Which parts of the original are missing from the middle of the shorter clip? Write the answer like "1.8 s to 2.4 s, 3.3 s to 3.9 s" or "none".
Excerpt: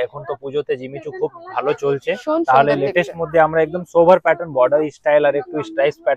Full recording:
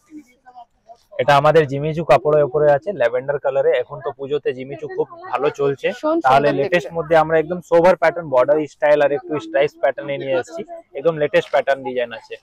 none